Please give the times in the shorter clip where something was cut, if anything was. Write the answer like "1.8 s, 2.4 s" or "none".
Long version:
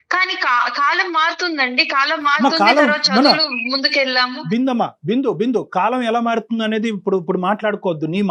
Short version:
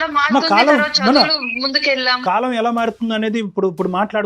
2.2 s